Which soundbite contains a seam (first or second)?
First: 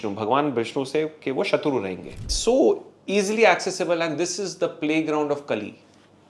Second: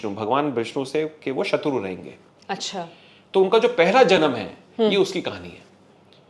first